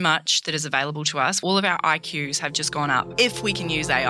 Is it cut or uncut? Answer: cut